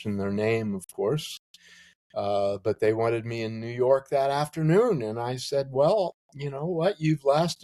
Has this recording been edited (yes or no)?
no